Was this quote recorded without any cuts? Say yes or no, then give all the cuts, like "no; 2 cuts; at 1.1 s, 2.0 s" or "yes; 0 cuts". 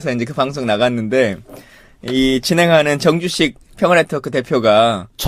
yes; 0 cuts